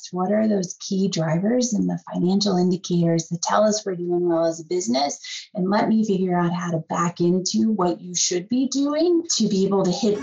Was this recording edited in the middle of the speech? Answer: yes; 1 cut; at 9.3 s

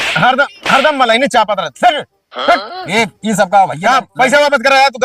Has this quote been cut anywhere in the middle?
no; 0 cuts

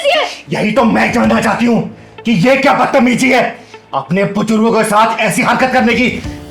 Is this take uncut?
yes; 0 cuts

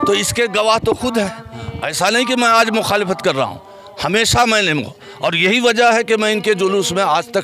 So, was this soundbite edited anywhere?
no; 0 cuts

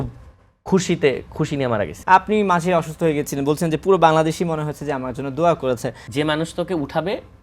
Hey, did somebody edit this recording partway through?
yes; 2 cuts; at 1.9 s, 6.0 s

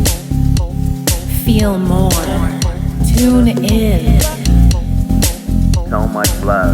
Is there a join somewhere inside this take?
yes; 1 cut; at 3.0 s

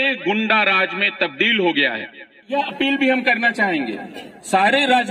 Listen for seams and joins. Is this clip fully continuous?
no; 1 cut; at 2.5 s

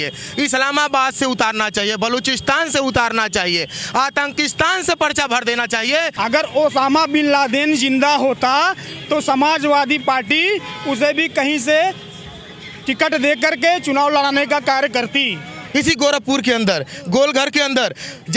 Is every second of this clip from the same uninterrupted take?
no; 2 cuts; at 6.1 s, 15.6 s

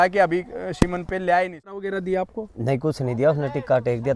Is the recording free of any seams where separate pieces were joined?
no; 1 cut; at 1.9 s

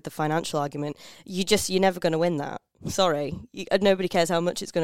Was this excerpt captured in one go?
yes; 0 cuts

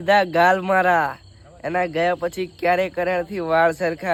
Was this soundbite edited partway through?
no; 0 cuts

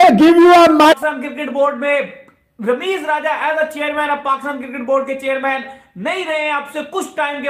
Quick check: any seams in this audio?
yes; 1 cut; at 0.9 s

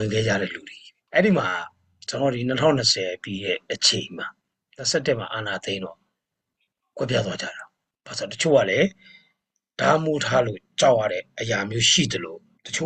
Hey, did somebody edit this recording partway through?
no; 0 cuts

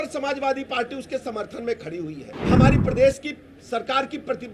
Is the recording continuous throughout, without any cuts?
no; 1 cut; at 2.3 s

